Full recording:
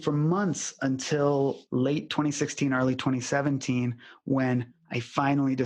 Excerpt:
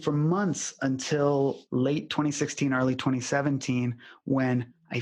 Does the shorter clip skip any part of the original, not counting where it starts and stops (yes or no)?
no